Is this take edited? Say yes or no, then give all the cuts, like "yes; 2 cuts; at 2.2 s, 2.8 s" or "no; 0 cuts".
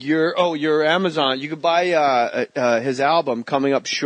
no; 0 cuts